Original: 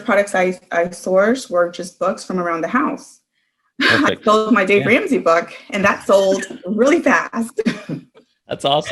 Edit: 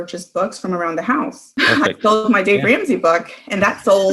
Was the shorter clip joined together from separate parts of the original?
yes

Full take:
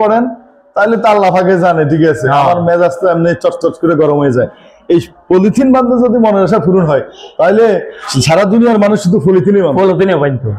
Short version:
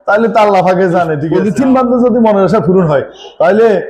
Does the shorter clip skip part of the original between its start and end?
yes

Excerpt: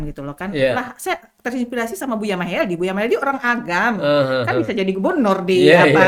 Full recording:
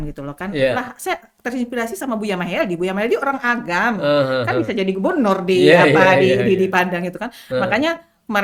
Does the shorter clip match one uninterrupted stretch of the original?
yes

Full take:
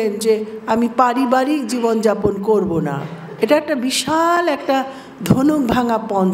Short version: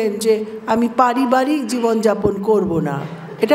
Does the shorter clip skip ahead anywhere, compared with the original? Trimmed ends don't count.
no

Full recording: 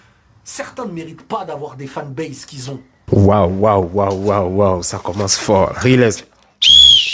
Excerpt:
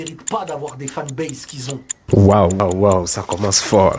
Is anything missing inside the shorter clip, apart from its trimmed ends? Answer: yes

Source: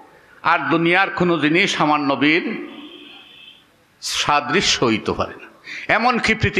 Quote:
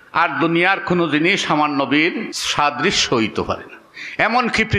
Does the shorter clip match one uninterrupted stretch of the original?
no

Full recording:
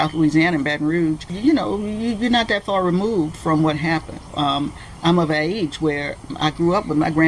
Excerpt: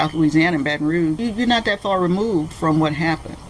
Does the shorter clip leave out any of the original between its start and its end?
yes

